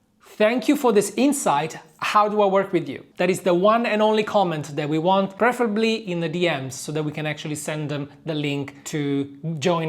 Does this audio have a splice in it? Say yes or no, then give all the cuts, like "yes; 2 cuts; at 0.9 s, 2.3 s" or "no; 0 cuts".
yes; 3 cuts; at 3.0 s, 5.3 s, 8.8 s